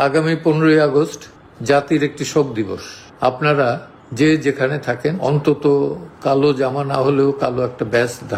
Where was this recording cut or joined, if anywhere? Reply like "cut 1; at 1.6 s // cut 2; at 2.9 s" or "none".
cut 1; at 5.2 s